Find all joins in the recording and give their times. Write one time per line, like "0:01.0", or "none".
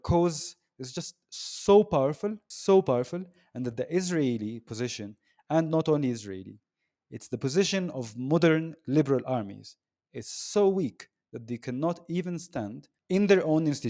0:02.5
0:12.9